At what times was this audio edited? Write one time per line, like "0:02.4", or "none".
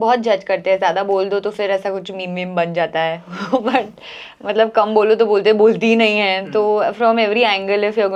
none

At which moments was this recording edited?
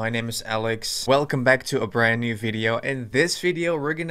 0:00.9

